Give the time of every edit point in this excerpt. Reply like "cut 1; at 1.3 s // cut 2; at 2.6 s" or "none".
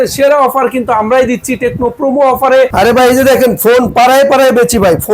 cut 1; at 2.7 s

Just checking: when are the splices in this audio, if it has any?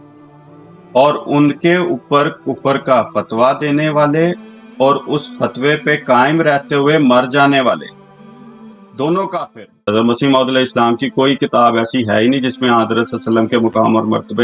cut 1; at 9.8 s

